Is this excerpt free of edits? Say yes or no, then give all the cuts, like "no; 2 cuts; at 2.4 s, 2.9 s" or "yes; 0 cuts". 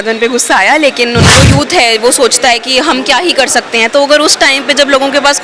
no; 1 cut; at 1.3 s